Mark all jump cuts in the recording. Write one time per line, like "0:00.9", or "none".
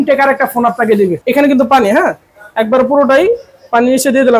0:01.2